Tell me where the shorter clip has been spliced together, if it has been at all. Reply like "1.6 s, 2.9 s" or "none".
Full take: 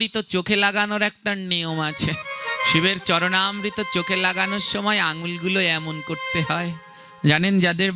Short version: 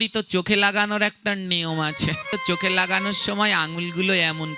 2.3 s